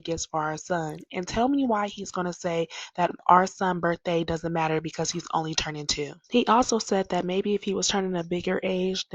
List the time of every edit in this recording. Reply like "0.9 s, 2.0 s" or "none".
7.4 s